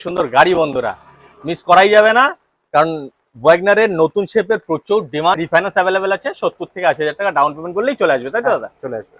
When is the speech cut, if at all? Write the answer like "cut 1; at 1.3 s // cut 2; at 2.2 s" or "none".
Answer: none